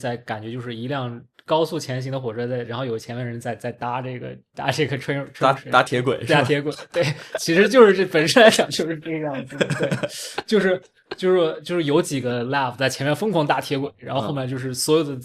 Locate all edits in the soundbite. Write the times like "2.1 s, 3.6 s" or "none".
none